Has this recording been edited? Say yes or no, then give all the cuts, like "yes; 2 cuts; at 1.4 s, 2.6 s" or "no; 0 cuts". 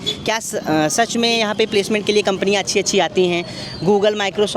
no; 0 cuts